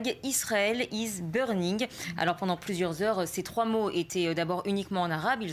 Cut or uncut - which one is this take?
cut